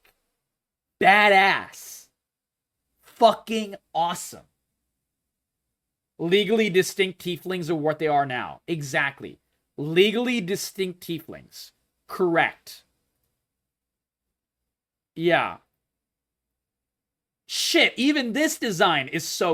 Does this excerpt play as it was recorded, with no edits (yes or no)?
yes